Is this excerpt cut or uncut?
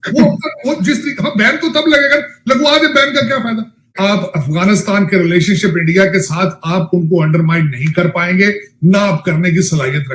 cut